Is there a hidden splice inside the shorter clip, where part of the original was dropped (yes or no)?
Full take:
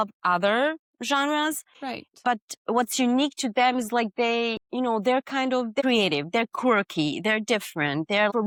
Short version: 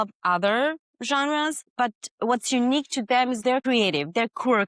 yes